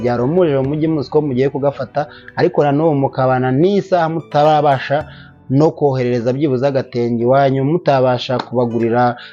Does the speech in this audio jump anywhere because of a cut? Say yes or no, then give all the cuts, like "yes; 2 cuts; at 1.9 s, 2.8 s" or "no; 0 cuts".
no; 0 cuts